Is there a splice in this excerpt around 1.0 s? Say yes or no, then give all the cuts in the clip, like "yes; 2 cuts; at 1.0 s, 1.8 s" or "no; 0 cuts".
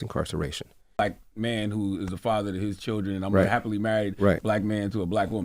yes; 1 cut; at 1.0 s